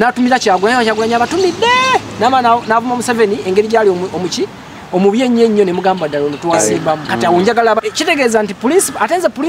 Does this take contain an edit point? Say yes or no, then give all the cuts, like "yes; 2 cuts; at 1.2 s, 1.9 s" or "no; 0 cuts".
yes; 1 cut; at 7.8 s